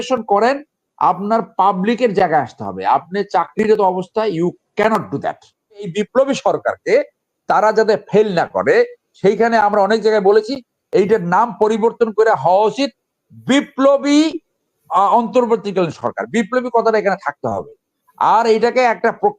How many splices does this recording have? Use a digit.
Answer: 1